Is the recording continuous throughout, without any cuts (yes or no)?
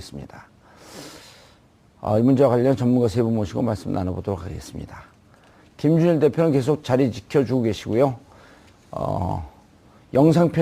no